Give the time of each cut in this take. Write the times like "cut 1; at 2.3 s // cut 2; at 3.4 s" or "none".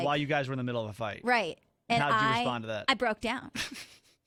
none